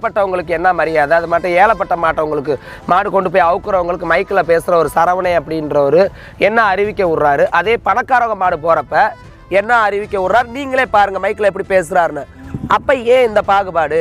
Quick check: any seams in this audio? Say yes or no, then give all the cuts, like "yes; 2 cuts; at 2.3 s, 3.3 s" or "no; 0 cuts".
no; 0 cuts